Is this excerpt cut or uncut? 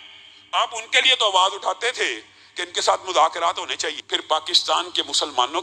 cut